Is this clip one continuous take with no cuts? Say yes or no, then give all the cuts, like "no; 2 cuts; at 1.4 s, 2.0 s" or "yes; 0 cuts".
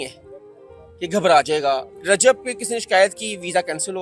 no; 1 cut; at 1.9 s